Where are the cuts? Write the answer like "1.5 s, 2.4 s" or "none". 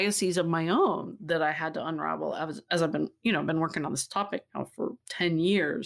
none